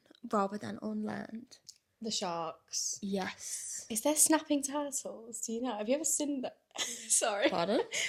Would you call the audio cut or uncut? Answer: uncut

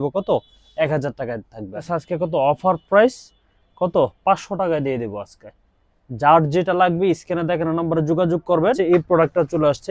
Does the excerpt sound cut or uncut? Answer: cut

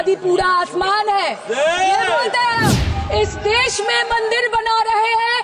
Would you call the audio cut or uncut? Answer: cut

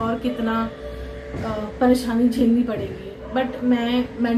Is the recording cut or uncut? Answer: uncut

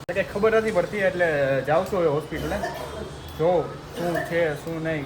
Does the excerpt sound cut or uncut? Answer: uncut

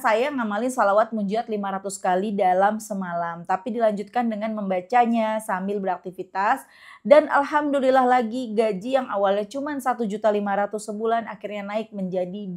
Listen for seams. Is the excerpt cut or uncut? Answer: uncut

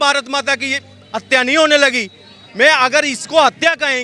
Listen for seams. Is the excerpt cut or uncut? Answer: uncut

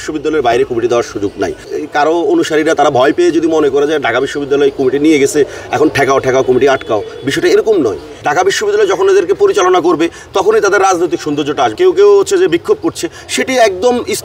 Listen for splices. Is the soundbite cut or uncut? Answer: cut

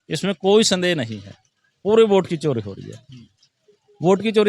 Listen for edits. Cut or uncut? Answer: uncut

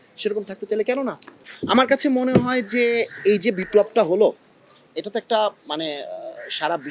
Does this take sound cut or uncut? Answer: uncut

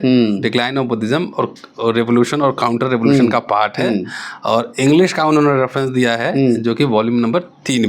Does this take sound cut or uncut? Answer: uncut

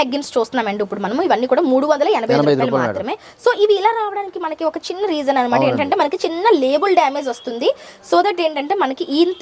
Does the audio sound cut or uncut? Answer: uncut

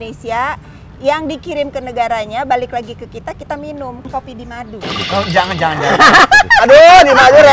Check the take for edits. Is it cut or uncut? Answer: cut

